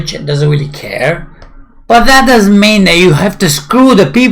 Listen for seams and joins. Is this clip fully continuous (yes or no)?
yes